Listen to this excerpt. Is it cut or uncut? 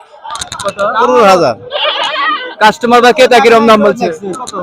uncut